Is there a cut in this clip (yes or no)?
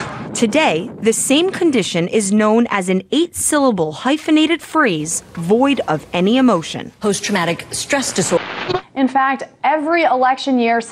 yes